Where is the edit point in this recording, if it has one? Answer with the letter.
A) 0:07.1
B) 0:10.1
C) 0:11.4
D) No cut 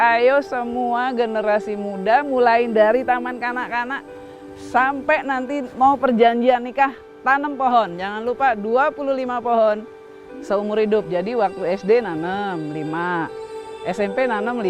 D